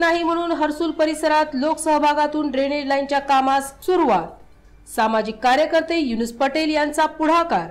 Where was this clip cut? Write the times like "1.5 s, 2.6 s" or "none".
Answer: none